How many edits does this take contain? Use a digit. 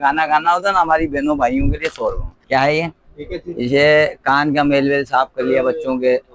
1